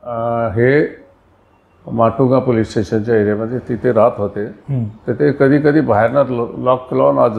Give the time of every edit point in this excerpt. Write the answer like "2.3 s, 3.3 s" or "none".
none